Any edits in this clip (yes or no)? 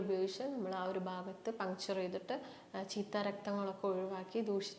no